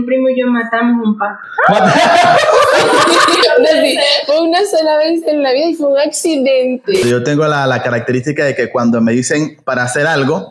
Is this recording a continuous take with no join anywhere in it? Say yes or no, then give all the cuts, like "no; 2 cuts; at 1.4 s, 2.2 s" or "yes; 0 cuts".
no; 2 cuts; at 3.4 s, 7.0 s